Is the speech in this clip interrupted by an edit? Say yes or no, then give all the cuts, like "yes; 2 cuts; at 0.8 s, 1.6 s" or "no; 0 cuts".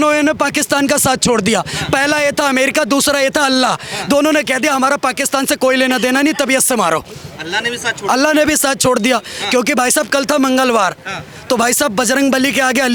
no; 0 cuts